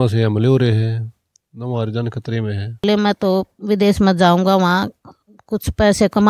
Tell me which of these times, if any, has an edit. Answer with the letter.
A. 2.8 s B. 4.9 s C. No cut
A